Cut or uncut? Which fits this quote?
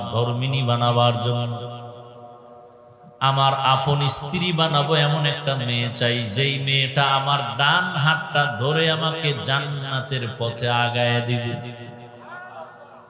uncut